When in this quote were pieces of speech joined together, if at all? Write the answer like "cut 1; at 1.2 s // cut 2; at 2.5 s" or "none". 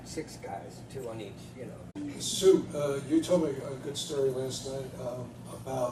none